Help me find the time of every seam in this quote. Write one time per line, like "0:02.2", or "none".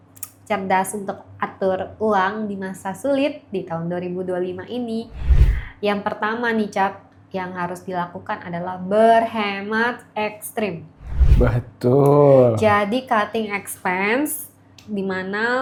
none